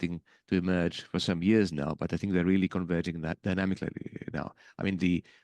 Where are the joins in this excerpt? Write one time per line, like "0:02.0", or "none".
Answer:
none